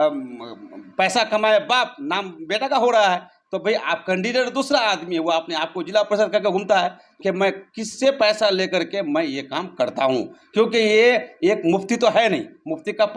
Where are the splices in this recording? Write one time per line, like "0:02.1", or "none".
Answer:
0:07.1